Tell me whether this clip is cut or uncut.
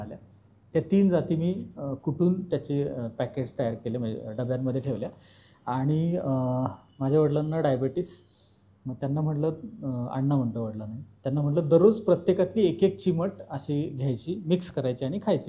uncut